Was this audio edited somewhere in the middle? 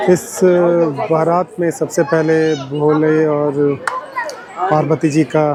no; 0 cuts

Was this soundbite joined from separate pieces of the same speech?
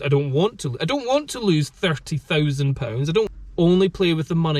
yes; 1 cut; at 3.3 s

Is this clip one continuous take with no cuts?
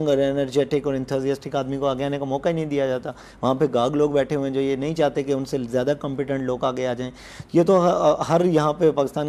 yes; 0 cuts

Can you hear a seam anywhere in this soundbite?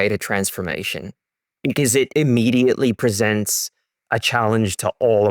yes; 1 cut; at 2.1 s

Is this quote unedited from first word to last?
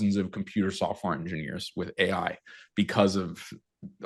yes; 0 cuts

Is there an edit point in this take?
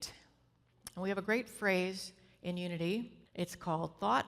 yes; 1 cut; at 3.2 s

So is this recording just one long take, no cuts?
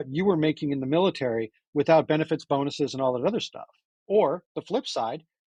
yes; 0 cuts

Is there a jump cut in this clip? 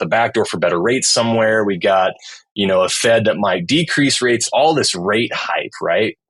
yes; 1 cut; at 4.5 s

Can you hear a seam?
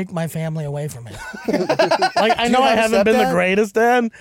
no; 0 cuts

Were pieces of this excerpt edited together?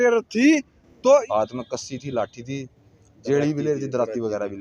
yes; 1 cut; at 1.3 s

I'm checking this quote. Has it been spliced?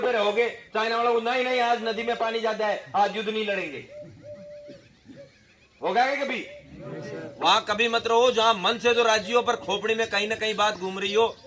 yes; 1 cut; at 7.2 s

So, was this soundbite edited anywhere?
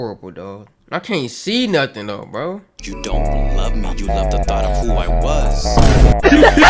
no; 0 cuts

